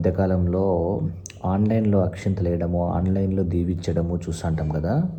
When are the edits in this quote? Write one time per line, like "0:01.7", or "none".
none